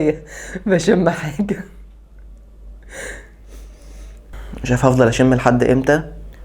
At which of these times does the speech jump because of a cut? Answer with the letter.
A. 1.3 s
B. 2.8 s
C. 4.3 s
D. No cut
C